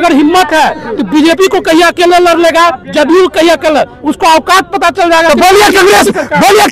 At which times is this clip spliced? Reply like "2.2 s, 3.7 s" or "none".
none